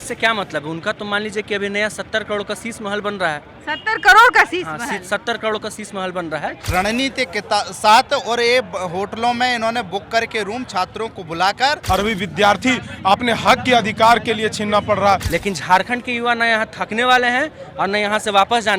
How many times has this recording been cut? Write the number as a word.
three